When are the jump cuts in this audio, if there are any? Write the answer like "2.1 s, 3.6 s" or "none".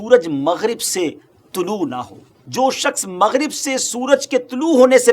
2.4 s